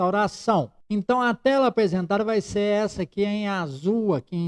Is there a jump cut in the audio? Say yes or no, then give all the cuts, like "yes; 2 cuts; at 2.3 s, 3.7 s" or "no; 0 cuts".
no; 0 cuts